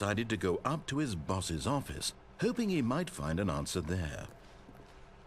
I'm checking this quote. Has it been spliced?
yes; 1 cut; at 4.3 s

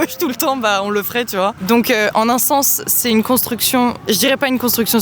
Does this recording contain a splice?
no; 0 cuts

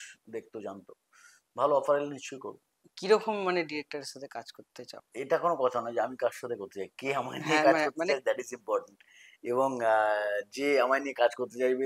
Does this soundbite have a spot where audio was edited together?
no; 0 cuts

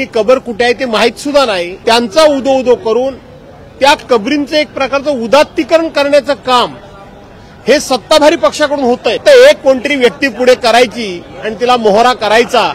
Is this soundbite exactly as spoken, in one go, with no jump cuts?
no; 2 cuts; at 1.7 s, 9.2 s

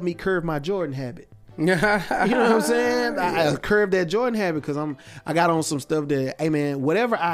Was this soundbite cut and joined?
no; 0 cuts

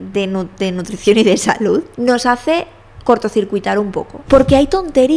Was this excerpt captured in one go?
no; 2 cuts; at 1.9 s, 4.1 s

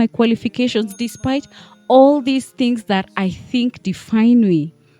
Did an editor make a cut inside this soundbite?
no; 0 cuts

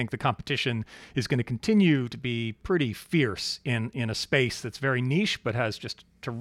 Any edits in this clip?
no; 0 cuts

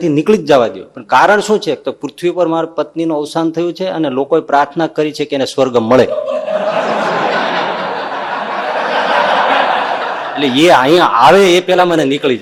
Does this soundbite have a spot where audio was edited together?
no; 0 cuts

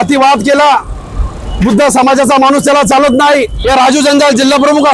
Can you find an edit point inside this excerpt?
yes; 1 cut; at 3.5 s

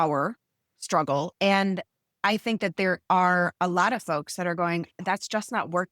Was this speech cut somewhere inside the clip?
yes; 1 cut; at 1.3 s

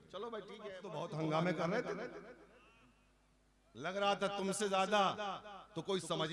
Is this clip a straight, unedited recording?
no; 1 cut; at 1.0 s

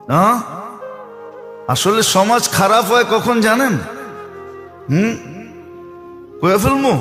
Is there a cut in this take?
no; 0 cuts

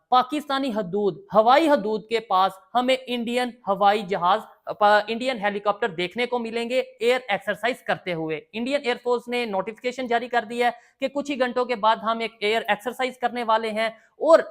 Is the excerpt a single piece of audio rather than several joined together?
yes; 0 cuts

